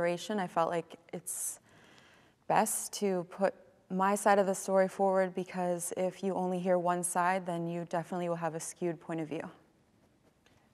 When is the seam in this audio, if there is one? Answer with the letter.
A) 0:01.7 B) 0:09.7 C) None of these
B